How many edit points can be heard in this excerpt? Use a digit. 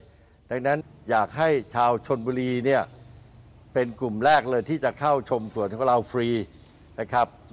1